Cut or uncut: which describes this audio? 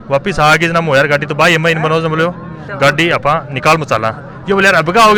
uncut